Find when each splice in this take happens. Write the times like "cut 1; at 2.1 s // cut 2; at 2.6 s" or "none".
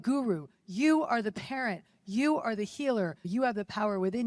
cut 1; at 3.2 s